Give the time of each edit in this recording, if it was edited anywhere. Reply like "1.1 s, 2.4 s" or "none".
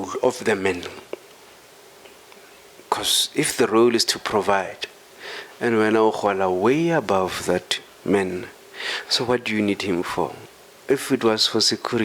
none